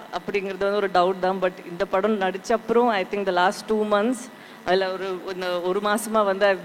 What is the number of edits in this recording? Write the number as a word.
zero